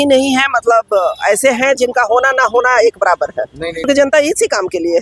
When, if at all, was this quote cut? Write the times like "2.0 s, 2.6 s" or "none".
3.9 s